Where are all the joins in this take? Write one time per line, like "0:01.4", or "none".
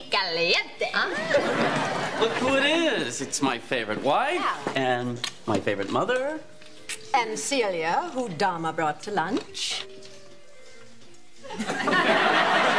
0:11.6